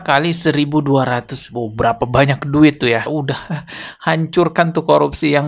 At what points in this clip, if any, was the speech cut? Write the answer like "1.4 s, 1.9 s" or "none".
3.1 s